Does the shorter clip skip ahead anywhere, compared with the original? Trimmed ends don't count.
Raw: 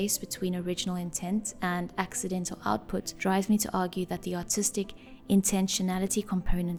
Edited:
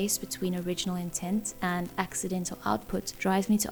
no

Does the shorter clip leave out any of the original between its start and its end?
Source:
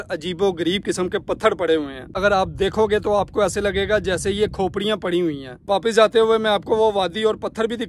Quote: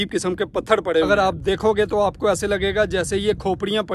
yes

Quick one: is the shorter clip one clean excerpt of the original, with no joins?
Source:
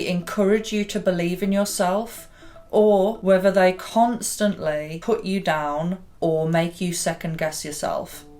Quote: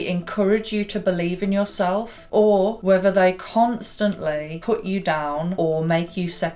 no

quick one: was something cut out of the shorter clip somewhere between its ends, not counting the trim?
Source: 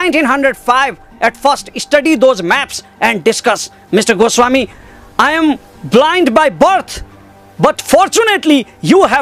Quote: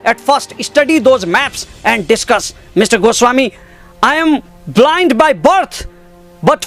no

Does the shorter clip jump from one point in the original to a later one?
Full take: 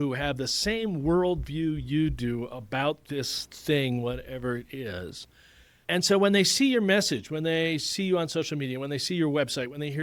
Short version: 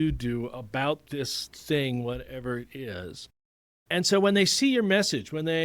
no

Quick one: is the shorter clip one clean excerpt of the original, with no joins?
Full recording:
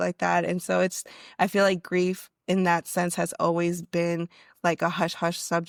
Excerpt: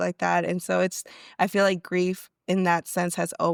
yes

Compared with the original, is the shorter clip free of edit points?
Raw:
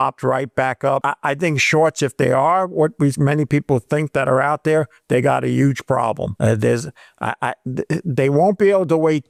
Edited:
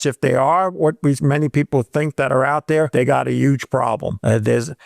no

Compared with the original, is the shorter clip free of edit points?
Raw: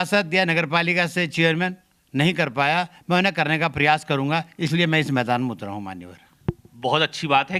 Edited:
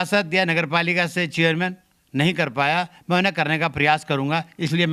yes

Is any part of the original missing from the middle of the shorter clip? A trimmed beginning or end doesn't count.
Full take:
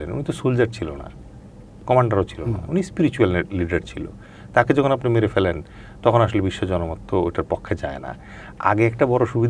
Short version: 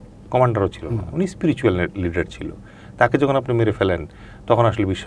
no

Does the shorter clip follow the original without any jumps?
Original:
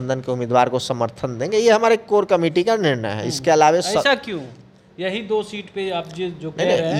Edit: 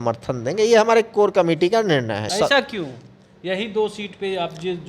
no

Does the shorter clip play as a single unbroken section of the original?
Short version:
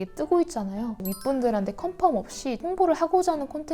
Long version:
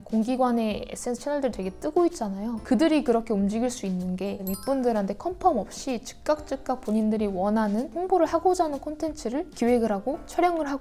no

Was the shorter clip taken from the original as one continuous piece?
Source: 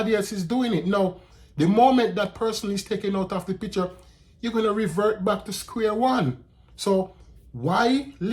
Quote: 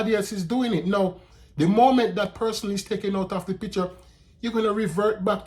yes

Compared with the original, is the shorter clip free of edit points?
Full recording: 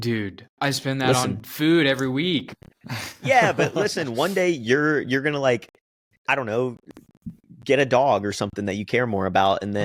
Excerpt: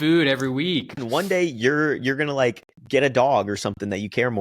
no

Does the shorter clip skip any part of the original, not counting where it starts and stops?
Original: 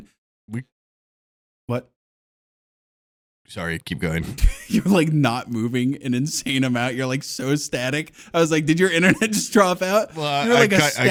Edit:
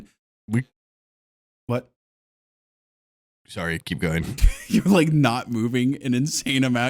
no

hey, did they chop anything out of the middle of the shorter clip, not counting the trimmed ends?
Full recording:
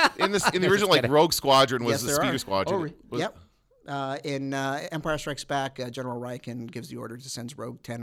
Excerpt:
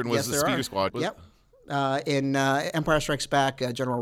yes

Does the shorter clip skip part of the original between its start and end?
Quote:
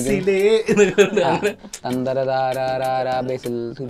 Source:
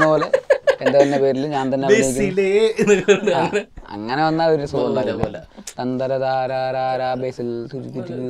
yes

